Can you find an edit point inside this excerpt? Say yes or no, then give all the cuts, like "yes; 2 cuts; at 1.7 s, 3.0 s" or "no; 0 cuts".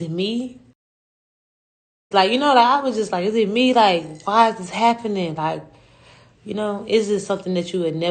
no; 0 cuts